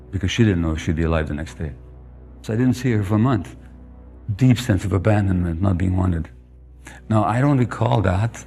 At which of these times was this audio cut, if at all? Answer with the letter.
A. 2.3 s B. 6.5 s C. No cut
A